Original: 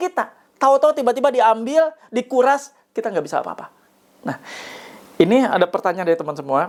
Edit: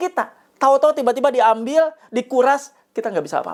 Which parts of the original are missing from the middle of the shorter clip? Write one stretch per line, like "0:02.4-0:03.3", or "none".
none